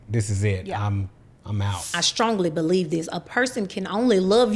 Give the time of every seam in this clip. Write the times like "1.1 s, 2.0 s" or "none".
2.0 s